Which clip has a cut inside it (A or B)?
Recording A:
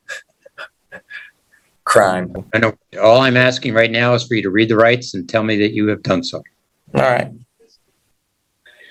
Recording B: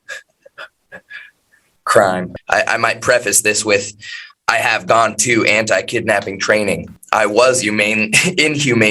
B